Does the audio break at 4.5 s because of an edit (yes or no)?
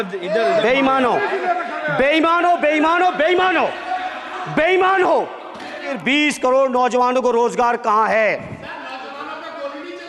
no